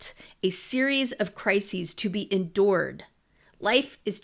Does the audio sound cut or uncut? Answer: uncut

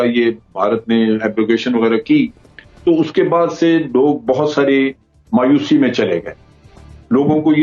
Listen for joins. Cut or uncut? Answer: uncut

